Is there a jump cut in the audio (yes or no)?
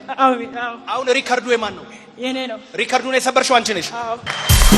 no